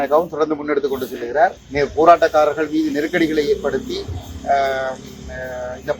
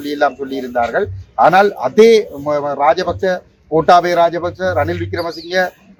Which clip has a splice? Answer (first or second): first